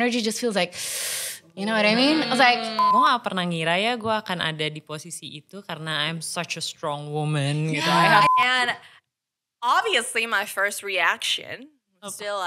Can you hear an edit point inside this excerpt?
yes; 2 cuts; at 2.9 s, 8.3 s

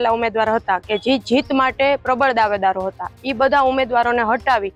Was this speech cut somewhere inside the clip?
no; 0 cuts

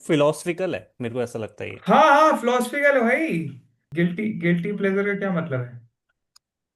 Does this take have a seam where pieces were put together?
yes; 1 cut; at 3.8 s

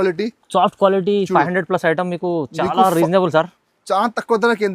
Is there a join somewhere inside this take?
no; 0 cuts

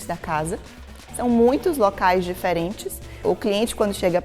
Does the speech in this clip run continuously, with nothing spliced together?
no; 1 cut; at 3.2 s

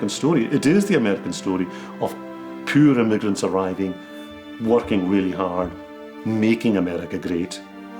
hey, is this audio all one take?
yes; 0 cuts

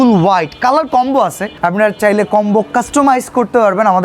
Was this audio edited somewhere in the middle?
yes; 1 cut; at 1.5 s

